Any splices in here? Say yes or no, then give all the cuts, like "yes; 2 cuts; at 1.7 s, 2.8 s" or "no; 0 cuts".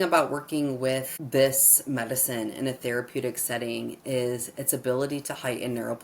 yes; 1 cut; at 1.1 s